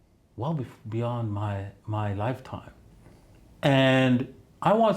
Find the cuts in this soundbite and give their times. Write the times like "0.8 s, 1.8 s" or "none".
2.8 s